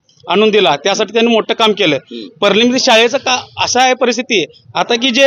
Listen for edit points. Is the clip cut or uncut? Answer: uncut